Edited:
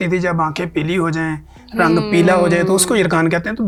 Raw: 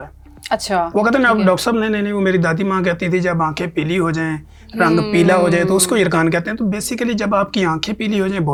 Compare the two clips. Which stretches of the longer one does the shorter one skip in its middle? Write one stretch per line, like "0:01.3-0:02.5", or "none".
none